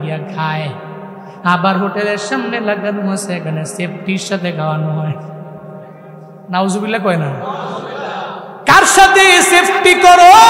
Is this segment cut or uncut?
uncut